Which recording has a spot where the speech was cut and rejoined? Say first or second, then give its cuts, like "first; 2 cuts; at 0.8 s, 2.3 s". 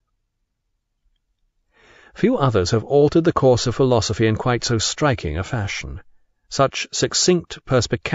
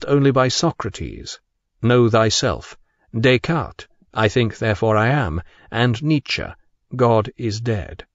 first; 1 cut; at 5.1 s